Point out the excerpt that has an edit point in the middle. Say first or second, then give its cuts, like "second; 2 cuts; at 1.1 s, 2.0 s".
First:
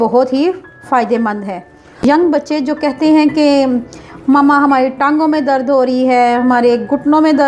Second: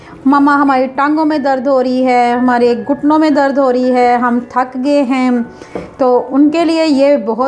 first; 1 cut; at 2.0 s